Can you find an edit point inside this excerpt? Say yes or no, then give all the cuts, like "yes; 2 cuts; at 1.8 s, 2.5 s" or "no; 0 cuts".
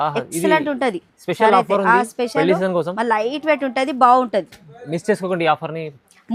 no; 0 cuts